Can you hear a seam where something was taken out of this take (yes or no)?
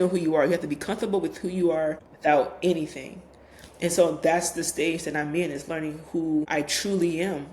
yes